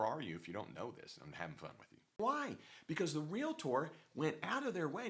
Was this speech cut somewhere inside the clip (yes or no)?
yes